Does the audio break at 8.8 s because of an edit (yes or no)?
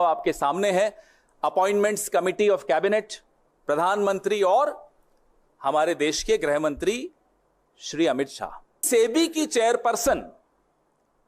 yes